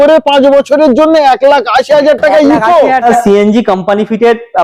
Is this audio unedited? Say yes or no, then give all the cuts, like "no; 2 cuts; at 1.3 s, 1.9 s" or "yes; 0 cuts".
no; 1 cut; at 3.0 s